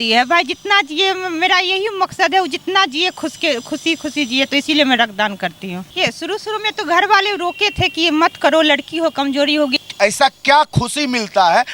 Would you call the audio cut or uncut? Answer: cut